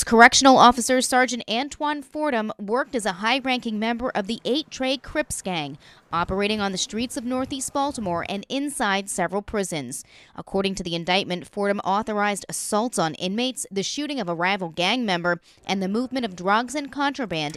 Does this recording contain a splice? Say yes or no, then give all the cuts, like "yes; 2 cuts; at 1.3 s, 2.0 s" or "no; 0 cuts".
no; 0 cuts